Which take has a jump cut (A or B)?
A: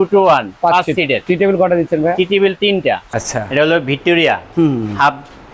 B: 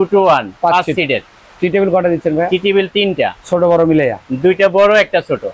A